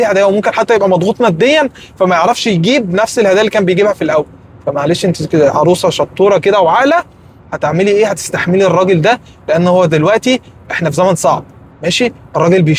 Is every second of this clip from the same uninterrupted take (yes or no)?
yes